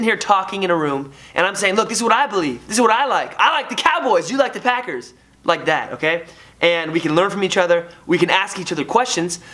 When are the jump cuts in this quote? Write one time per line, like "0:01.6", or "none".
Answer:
none